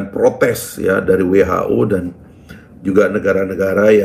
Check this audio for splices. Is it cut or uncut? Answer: uncut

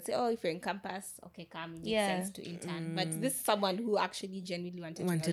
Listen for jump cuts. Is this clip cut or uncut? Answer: uncut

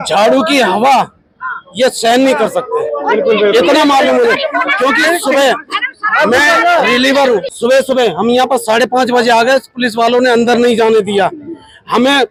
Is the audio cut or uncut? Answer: uncut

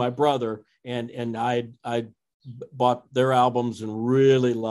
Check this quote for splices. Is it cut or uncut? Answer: uncut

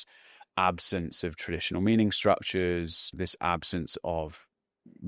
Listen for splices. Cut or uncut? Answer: cut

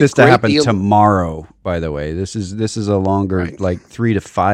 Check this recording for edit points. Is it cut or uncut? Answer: uncut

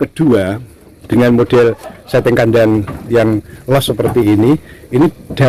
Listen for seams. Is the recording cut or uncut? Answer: uncut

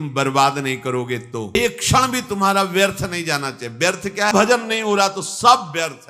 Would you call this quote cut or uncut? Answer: cut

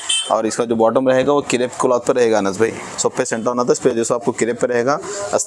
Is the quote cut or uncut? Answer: uncut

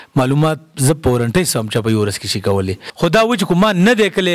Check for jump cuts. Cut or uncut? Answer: cut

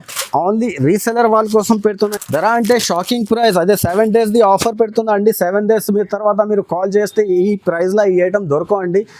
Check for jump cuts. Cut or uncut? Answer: cut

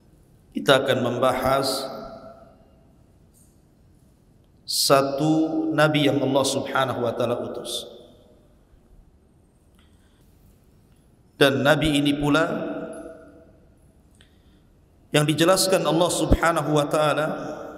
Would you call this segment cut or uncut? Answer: cut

